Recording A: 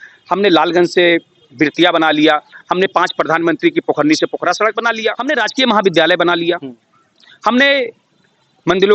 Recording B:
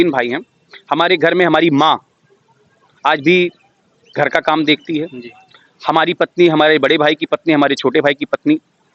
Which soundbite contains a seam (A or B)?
A